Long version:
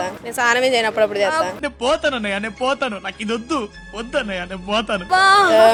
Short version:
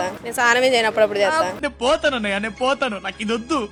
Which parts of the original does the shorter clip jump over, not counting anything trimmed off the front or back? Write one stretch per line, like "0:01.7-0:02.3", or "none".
none